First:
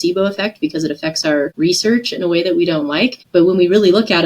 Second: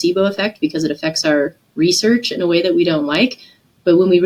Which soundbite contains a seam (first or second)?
first